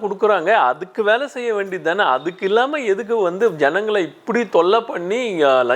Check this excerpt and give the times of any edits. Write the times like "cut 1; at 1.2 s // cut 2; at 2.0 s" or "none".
none